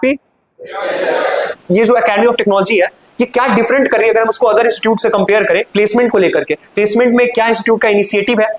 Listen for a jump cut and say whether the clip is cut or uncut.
cut